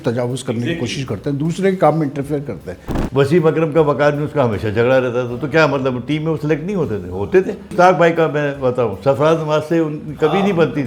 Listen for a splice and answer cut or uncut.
cut